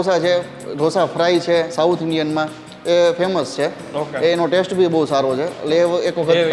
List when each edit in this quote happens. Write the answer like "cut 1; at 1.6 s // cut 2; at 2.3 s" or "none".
none